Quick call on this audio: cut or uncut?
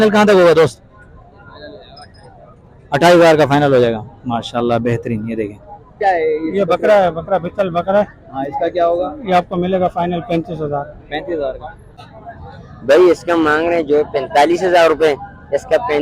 cut